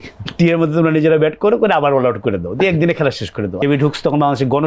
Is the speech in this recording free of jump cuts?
no; 1 cut; at 3.5 s

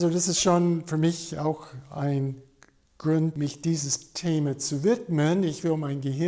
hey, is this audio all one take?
no; 1 cut; at 3.3 s

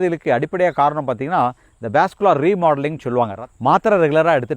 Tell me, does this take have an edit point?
yes; 1 cut; at 3.4 s

